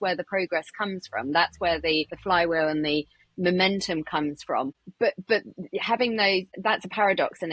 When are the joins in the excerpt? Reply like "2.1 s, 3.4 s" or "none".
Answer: 2.1 s, 4.8 s, 6.5 s